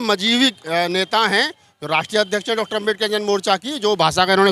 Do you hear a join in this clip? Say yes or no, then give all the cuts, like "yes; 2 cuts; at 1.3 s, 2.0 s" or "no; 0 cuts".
no; 0 cuts